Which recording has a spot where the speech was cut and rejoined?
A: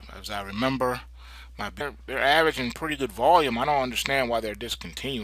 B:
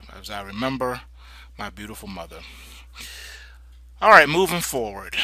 B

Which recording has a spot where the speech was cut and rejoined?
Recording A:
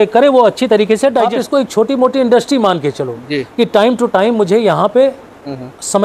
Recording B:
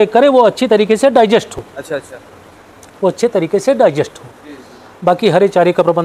A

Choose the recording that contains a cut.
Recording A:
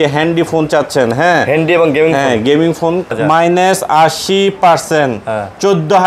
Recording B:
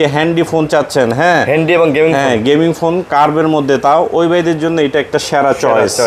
A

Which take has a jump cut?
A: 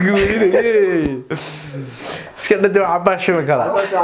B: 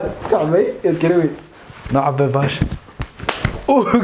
A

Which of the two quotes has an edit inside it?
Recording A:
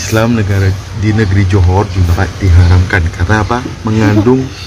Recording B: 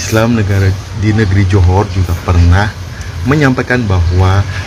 A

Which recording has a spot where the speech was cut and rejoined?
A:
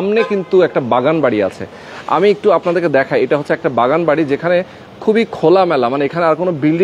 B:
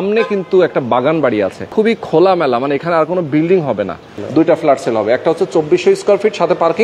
B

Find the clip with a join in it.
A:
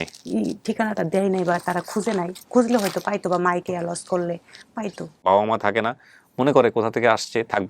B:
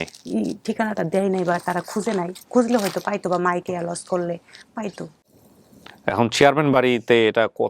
A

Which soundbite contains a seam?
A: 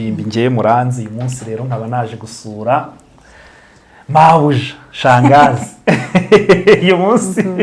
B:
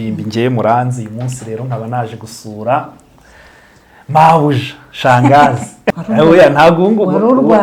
B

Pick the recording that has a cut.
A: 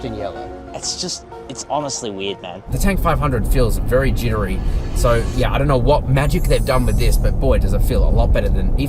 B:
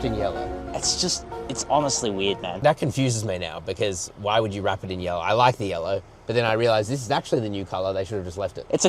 A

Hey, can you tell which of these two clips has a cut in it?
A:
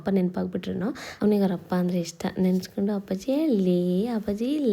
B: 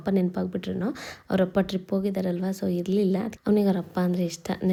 A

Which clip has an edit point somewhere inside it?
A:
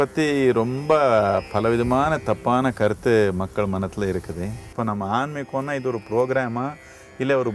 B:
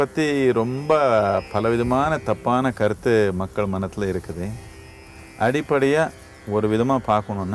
A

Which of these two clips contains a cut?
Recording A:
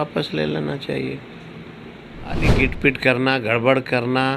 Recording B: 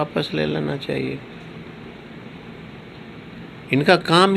A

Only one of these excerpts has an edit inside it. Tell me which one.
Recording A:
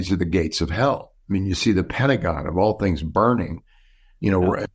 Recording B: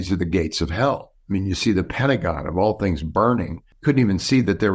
B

